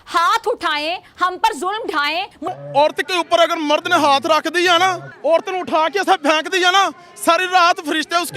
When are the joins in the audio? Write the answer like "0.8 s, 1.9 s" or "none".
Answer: 2.5 s, 5.1 s